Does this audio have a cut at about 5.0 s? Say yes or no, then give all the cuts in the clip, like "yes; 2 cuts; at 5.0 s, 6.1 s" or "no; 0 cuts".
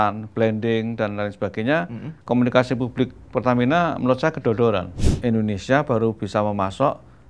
yes; 1 cut; at 5.0 s